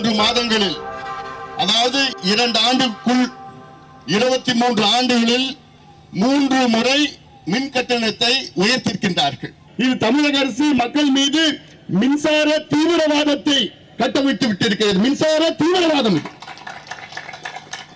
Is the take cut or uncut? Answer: cut